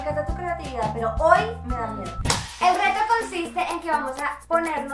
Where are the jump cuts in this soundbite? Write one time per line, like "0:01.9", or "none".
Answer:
0:02.3